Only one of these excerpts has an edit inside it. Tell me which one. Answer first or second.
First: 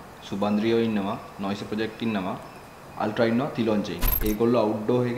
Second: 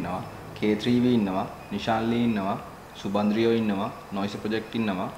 first